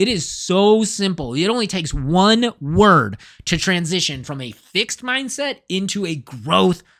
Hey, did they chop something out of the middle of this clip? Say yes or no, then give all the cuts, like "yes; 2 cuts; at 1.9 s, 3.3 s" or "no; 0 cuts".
no; 0 cuts